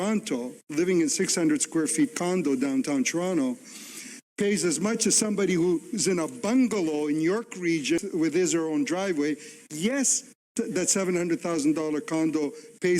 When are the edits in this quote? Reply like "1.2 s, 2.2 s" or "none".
8.0 s, 10.5 s